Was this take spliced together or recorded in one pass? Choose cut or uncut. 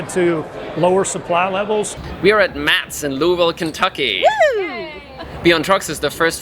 cut